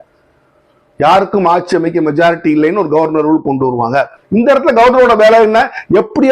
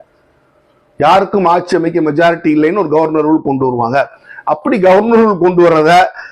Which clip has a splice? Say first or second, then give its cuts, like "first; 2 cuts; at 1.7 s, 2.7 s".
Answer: first; 1 cut; at 4.2 s